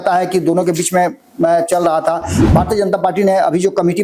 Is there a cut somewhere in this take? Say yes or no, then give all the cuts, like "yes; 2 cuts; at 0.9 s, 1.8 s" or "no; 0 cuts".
yes; 1 cut; at 2.3 s